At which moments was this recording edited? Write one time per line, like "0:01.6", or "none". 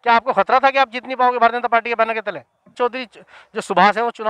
0:02.8